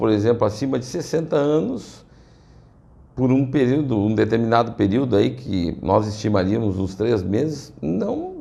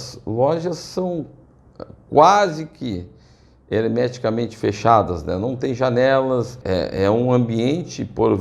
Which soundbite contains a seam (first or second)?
second